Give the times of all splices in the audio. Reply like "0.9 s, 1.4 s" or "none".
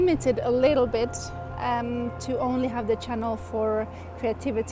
none